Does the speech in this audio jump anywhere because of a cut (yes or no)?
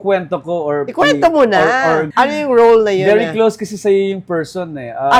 no